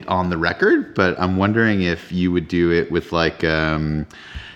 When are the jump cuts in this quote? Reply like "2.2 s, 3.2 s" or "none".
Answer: none